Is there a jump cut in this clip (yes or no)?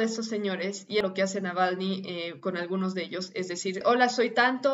yes